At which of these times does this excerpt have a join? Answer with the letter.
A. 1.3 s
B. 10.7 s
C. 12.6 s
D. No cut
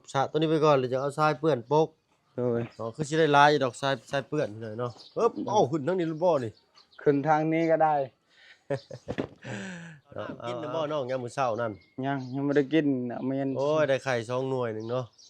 B